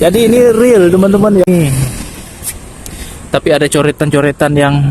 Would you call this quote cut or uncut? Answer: cut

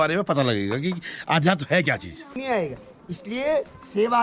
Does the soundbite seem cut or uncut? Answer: cut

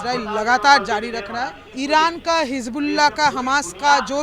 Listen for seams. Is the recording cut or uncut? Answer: cut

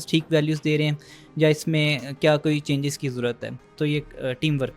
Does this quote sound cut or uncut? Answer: uncut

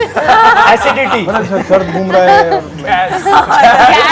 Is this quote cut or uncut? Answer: uncut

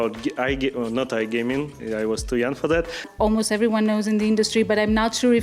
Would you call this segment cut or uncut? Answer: cut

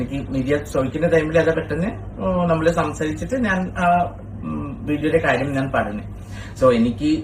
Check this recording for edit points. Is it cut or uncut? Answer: uncut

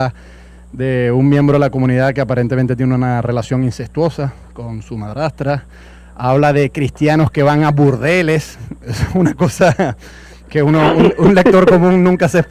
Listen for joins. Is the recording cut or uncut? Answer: cut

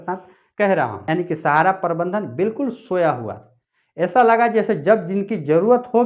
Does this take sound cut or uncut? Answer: cut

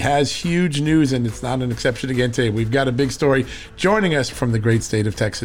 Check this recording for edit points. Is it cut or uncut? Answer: cut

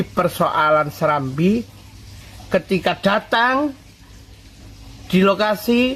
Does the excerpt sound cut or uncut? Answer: uncut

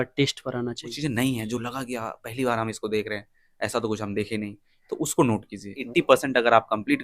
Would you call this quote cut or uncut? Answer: cut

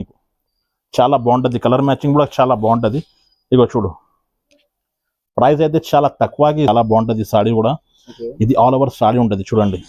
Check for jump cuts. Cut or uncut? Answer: cut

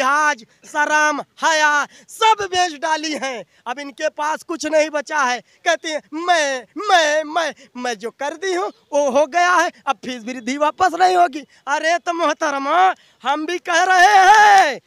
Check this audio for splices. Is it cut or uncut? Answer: uncut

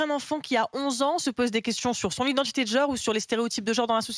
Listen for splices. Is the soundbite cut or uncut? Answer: uncut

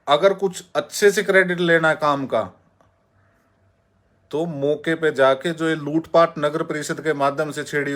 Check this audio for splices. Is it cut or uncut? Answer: uncut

